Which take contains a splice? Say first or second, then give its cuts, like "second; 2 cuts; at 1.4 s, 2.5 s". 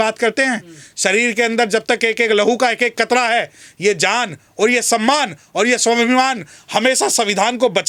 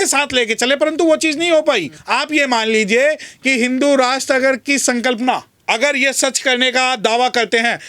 second; 2 cuts; at 1.9 s, 5.5 s